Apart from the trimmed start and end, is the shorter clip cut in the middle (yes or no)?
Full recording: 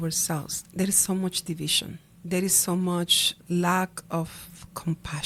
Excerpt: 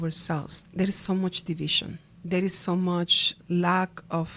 no